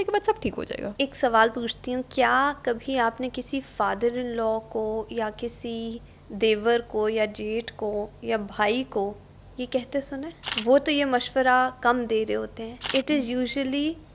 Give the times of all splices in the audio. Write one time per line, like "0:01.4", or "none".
0:00.9
0:10.4
0:12.9